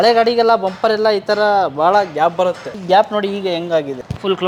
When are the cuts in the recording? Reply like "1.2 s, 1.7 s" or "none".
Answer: none